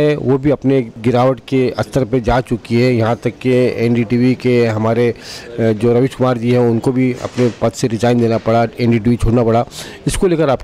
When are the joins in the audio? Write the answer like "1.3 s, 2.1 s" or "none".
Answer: none